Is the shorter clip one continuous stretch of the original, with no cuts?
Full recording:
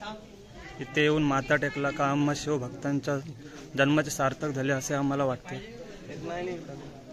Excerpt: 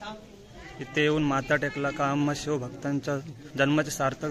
no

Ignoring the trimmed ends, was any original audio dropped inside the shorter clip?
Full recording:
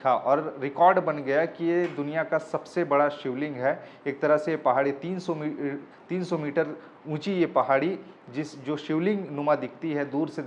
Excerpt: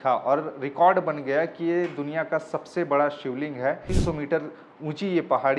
yes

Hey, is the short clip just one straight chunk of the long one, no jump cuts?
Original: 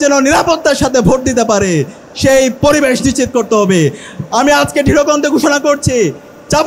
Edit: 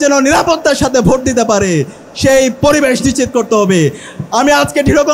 yes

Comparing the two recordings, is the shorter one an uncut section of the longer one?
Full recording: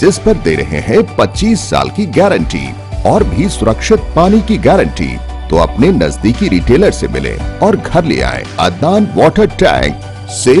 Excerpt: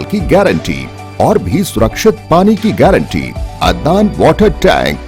no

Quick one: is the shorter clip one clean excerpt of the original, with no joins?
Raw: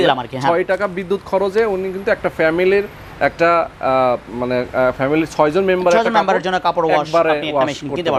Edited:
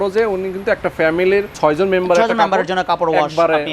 no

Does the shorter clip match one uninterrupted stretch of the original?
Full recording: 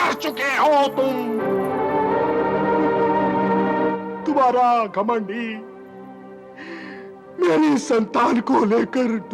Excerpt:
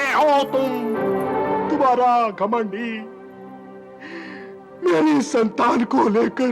no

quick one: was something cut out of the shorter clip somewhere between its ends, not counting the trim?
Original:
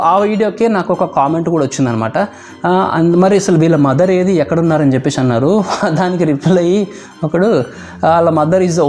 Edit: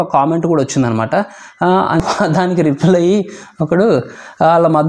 yes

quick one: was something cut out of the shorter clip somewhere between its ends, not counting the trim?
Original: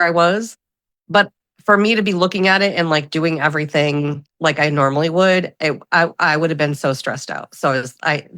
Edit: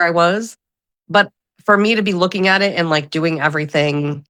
no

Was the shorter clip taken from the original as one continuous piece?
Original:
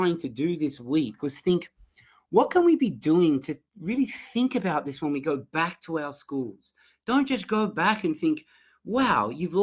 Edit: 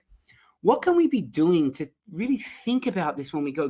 yes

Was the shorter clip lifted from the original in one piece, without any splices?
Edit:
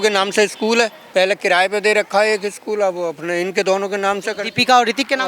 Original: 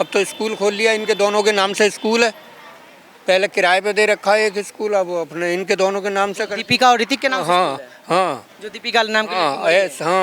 no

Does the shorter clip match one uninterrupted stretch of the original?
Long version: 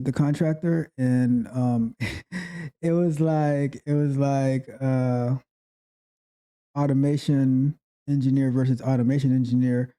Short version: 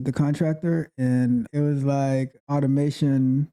no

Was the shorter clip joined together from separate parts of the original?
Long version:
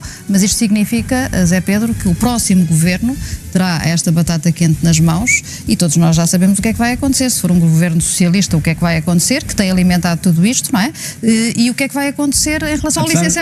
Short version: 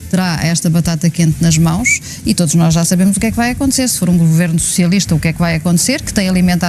no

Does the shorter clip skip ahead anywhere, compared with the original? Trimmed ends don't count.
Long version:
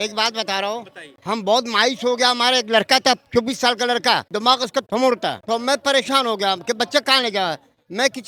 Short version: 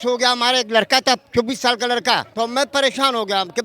yes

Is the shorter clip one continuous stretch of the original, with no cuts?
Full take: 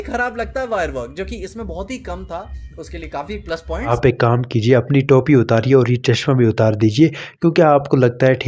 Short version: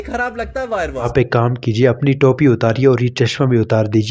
no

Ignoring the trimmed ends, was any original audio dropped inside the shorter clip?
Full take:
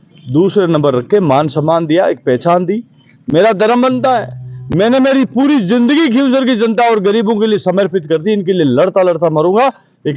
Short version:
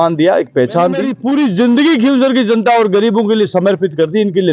yes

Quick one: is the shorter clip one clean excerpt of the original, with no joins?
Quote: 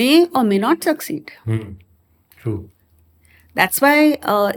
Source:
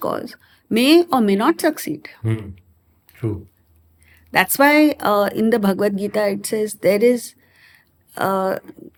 yes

